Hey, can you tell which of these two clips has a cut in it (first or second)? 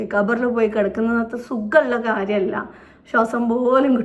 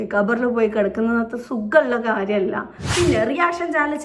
second